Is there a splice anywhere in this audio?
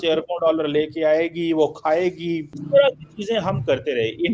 yes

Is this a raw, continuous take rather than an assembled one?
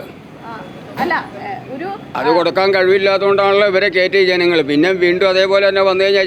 yes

